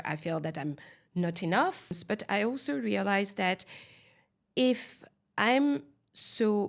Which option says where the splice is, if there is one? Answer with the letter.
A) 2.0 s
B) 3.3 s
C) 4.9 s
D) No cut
A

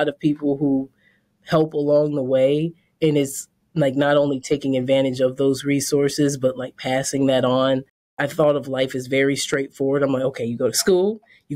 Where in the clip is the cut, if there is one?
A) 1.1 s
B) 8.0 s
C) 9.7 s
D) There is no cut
B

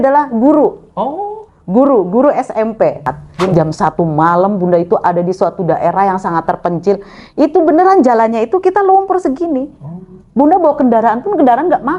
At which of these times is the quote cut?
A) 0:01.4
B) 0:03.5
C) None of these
B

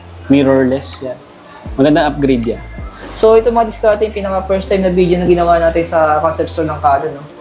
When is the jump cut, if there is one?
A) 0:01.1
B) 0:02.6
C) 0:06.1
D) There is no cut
B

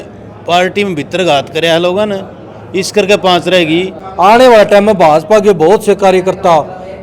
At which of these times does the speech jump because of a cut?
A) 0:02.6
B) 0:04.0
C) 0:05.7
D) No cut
B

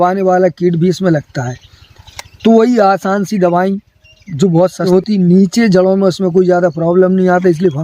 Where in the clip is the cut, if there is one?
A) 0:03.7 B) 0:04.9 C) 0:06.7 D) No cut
B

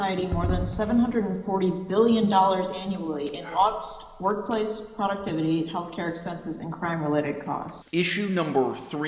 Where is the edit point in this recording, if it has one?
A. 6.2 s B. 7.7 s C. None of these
B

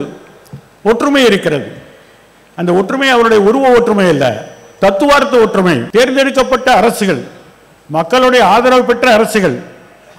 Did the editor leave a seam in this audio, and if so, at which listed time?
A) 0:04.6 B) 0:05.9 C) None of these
B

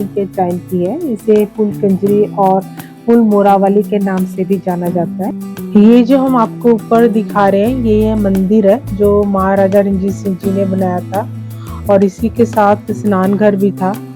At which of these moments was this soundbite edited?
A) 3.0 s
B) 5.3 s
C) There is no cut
B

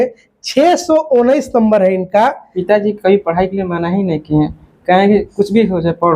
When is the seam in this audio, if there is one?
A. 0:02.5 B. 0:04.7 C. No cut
A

